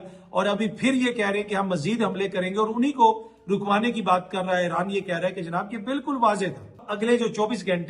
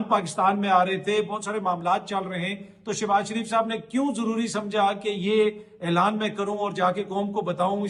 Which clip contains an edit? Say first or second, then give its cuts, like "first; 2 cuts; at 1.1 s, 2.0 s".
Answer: first; 1 cut; at 6.9 s